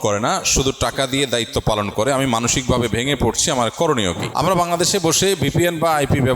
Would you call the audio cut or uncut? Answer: cut